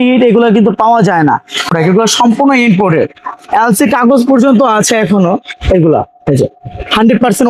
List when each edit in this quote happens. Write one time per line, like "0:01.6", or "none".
0:01.7